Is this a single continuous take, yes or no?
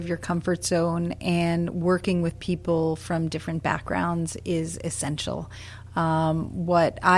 yes